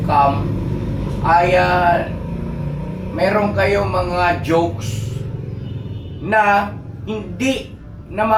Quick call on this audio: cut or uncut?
uncut